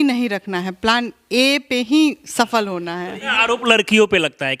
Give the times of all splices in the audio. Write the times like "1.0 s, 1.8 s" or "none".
3.3 s